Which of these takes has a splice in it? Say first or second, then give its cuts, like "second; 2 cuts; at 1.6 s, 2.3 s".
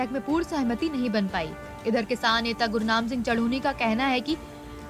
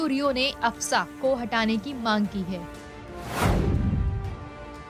first; 1 cut; at 3.5 s